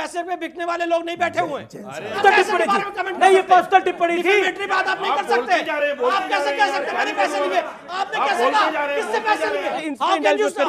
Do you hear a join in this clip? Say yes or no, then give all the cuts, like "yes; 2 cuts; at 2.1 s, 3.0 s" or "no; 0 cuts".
yes; 2 cuts; at 2.2 s, 9.8 s